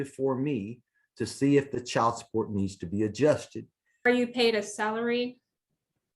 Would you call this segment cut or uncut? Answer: cut